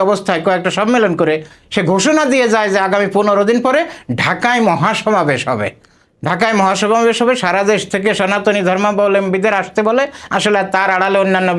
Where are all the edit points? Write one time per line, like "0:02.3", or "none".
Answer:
none